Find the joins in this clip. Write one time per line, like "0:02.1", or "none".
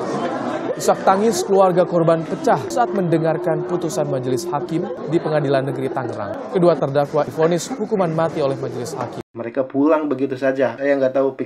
0:07.3
0:09.4